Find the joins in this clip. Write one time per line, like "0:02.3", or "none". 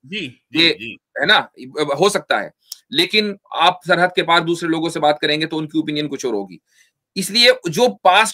none